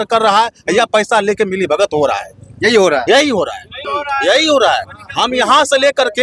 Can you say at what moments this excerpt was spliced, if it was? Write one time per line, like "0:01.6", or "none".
none